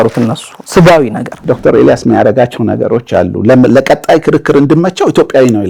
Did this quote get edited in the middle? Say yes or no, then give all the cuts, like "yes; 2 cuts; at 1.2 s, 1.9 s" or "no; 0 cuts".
yes; 1 cut; at 1.4 s